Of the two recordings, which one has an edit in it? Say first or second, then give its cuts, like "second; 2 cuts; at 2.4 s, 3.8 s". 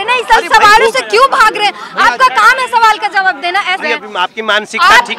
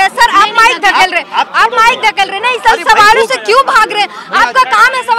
first; 1 cut; at 3.8 s